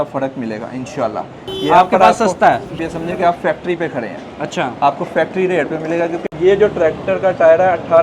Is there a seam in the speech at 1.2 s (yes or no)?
no